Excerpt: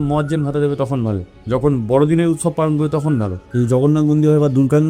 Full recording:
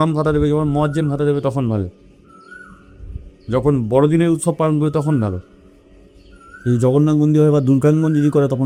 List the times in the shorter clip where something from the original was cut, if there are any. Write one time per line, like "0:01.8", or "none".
0:01.3
0:03.4